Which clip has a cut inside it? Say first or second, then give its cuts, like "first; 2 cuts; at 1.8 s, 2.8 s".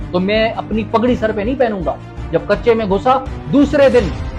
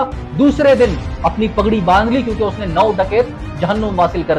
first; 1 cut; at 2.1 s